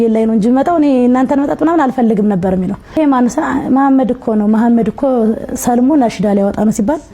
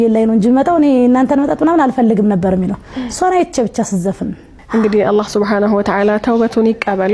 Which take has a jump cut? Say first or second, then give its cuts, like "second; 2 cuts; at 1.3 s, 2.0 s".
first; 1 cut; at 3.0 s